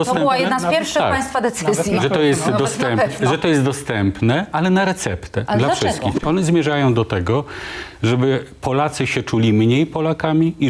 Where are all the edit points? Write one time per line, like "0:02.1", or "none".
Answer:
0:06.2